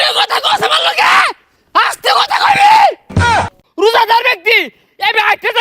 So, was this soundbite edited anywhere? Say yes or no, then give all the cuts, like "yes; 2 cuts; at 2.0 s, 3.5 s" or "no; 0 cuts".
yes; 1 cut; at 3.4 s